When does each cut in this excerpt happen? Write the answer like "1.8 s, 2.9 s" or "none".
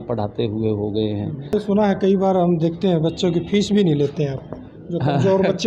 1.5 s